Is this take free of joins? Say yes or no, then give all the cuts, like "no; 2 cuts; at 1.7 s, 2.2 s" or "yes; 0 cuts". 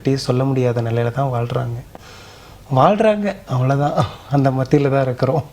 yes; 0 cuts